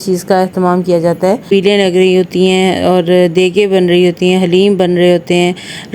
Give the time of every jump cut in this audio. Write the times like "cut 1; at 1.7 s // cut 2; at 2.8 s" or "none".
cut 1; at 1.5 s